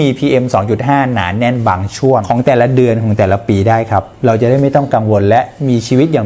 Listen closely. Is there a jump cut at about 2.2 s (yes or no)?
yes